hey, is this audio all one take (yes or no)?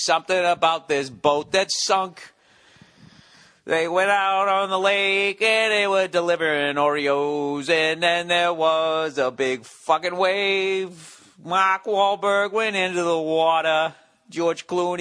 no